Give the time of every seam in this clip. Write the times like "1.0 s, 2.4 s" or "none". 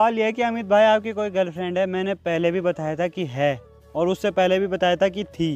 none